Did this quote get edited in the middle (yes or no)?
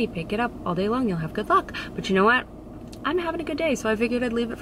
no